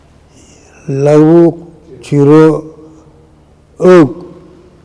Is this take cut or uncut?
uncut